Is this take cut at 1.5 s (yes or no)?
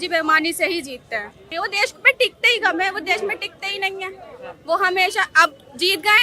yes